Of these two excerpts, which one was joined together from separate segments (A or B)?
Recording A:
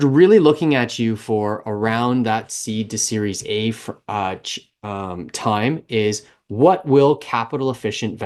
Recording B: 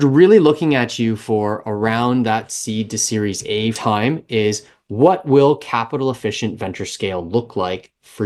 B